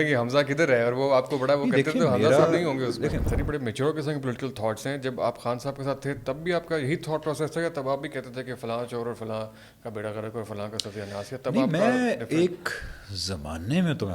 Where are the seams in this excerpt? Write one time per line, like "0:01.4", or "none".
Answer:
0:03.2